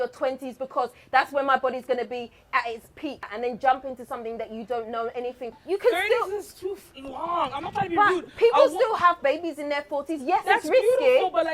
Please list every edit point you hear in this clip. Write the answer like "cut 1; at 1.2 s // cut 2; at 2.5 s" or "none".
cut 1; at 3.3 s // cut 2; at 5.5 s